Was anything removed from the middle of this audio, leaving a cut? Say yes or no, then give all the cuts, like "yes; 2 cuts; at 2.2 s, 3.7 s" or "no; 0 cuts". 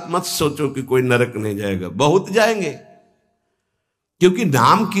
no; 0 cuts